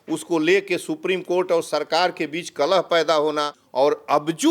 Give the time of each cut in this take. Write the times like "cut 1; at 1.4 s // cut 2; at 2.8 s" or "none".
cut 1; at 3.6 s